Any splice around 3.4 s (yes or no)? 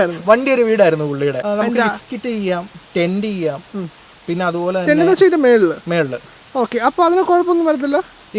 no